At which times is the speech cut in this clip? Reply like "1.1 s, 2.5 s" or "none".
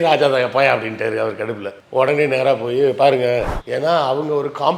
3.5 s

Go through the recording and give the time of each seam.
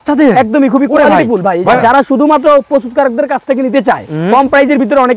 1.8 s

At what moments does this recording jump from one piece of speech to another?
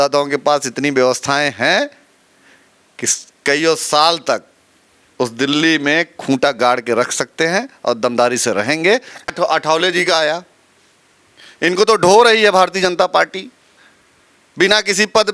9.3 s

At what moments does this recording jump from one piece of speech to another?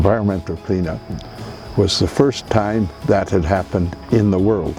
none

